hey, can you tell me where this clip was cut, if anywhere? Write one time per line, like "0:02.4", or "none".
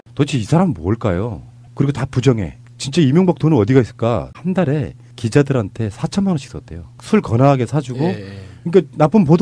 0:04.3